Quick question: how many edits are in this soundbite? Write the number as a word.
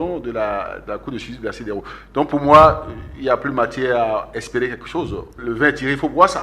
one